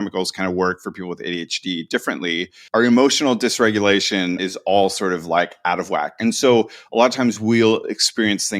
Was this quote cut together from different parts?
yes; 2 cuts; at 2.5 s, 4.4 s

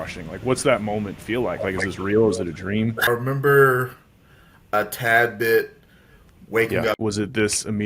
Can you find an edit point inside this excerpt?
yes; 2 cuts; at 3.1 s, 7.0 s

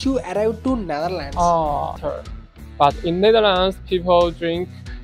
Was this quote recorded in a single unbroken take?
no; 1 cut; at 2.0 s

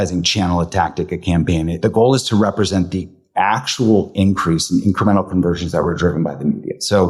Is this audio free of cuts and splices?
no; 1 cut; at 1.8 s

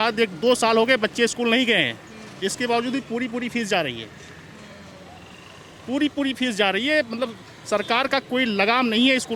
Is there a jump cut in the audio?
no; 0 cuts

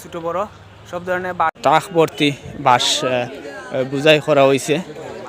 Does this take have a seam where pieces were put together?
yes; 1 cut; at 1.6 s

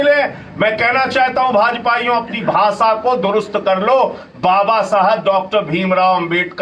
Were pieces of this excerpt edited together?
no; 0 cuts

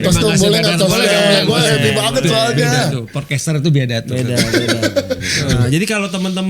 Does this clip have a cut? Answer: yes; 1 cut; at 5.5 s

